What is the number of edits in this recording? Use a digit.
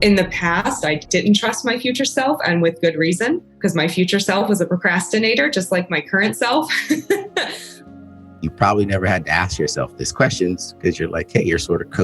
3